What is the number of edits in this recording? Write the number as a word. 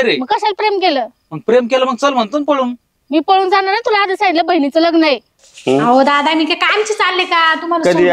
one